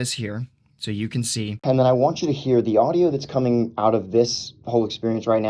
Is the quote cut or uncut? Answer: cut